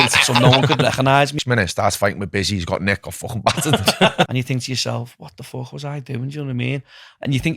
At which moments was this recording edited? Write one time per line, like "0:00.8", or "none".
0:01.4
0:04.3